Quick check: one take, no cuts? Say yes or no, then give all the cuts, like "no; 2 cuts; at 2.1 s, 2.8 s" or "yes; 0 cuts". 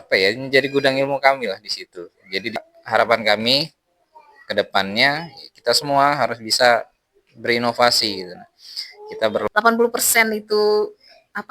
no; 2 cuts; at 2.6 s, 9.4 s